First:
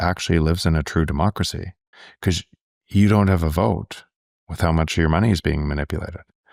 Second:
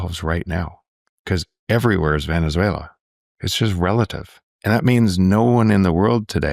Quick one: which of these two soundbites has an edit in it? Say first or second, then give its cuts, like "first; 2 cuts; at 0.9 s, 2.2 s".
second; 1 cut; at 4.5 s